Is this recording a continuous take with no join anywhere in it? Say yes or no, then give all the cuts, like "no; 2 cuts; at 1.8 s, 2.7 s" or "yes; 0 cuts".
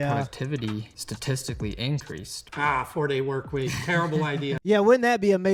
yes; 0 cuts